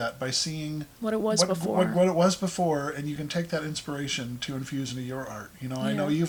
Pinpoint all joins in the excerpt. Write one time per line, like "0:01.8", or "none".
none